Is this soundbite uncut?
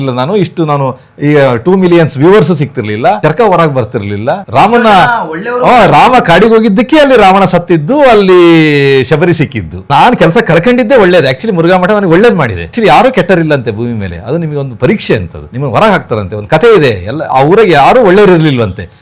no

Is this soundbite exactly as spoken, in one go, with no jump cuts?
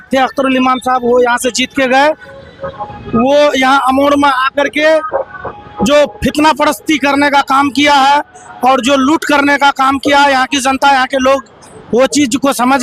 yes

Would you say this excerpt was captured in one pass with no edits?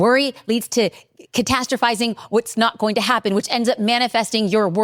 yes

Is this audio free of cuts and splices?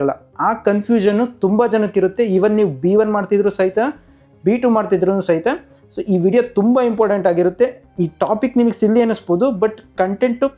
yes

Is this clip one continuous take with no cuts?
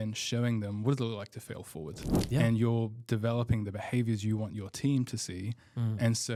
yes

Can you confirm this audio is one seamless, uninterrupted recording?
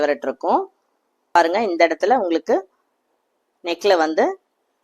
no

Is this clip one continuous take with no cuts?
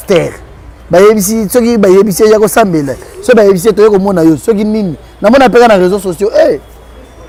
yes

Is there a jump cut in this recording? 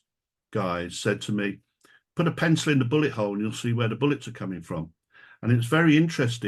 no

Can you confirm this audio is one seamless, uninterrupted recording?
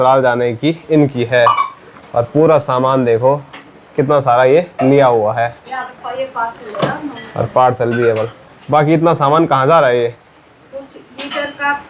yes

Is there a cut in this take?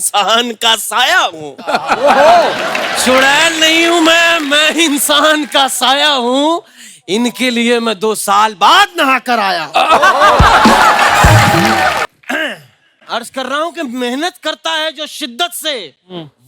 yes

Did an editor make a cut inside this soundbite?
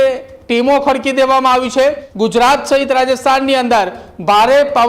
yes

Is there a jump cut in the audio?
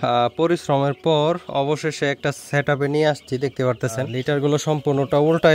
yes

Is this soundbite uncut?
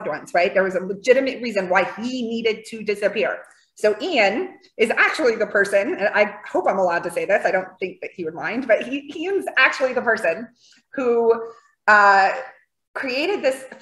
yes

